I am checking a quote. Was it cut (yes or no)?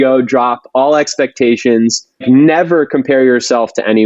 yes